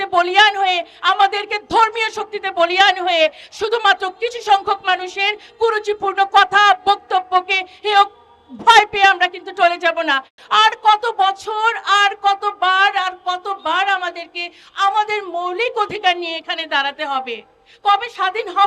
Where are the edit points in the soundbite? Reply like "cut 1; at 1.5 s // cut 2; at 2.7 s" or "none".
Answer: cut 1; at 10.3 s